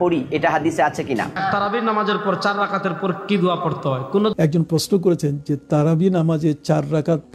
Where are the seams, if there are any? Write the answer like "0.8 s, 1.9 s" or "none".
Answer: 1.4 s, 4.3 s